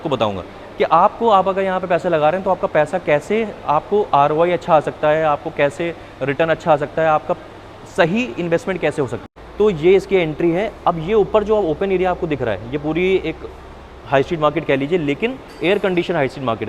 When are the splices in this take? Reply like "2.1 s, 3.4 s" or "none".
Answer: 9.2 s

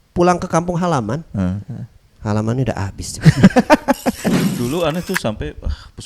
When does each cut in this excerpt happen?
4.3 s

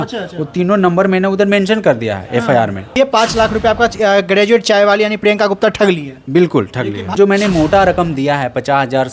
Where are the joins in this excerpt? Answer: 3.0 s, 7.1 s

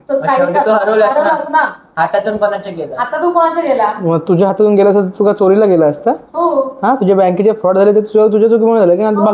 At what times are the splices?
none

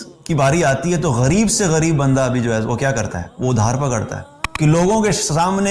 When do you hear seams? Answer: 4.4 s

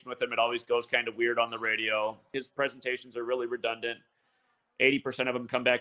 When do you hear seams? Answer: 2.2 s

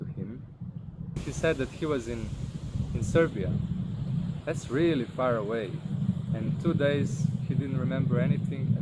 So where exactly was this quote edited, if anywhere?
1.2 s

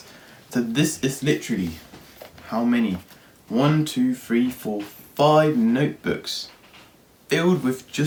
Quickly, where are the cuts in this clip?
none

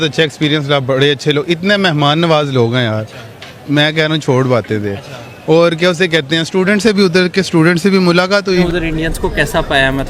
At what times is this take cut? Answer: 8.6 s

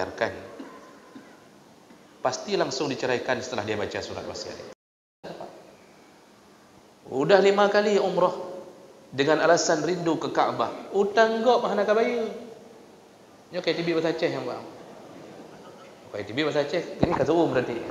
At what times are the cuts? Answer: 5.3 s

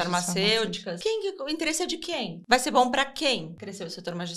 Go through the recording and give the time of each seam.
0.9 s, 2.4 s, 3.6 s

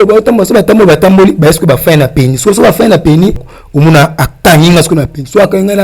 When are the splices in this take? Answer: 3.5 s

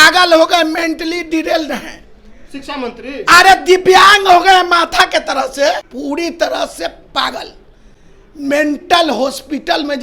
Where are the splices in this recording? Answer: 5.9 s

